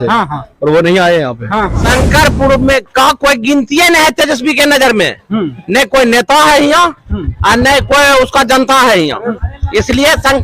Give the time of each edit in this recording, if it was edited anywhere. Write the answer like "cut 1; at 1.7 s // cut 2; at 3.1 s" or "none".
cut 1; at 1.8 s // cut 2; at 9.4 s